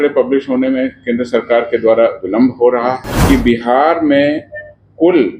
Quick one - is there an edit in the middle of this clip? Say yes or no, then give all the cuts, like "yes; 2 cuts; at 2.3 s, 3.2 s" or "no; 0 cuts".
yes; 1 cut; at 3.1 s